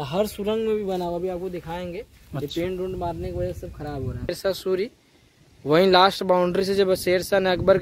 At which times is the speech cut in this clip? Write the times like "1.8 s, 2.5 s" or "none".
4.3 s